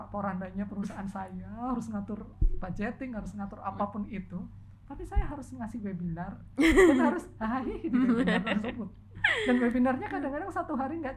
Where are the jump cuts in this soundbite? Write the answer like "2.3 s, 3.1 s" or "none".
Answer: none

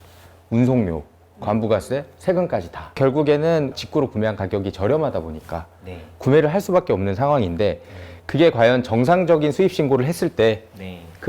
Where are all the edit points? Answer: 3.0 s

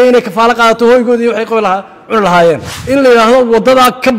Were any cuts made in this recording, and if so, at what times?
2.7 s

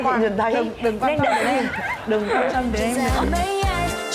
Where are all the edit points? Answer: 3.1 s

